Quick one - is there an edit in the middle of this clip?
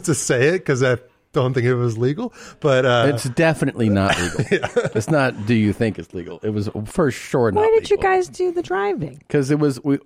no; 0 cuts

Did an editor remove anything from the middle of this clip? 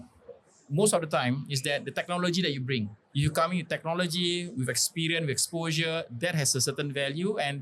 yes; 1 cut; at 3.0 s

